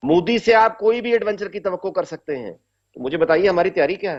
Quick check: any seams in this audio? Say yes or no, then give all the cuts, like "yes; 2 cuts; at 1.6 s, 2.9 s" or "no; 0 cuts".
no; 0 cuts